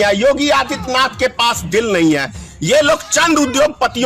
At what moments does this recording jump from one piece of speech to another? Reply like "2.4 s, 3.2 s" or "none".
none